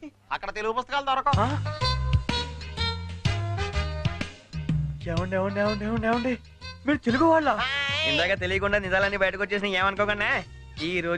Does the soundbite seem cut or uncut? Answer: uncut